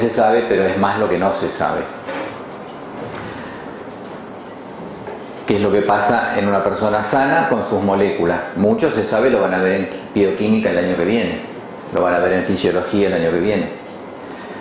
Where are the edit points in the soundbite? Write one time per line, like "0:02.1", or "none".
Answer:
0:09.3